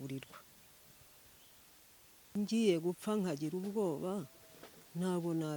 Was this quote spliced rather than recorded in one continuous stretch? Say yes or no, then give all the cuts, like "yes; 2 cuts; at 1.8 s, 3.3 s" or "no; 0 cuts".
yes; 1 cut; at 2.3 s